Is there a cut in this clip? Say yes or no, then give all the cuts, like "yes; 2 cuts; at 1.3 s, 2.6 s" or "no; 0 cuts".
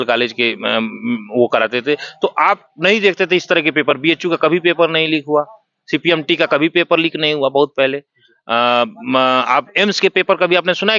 no; 0 cuts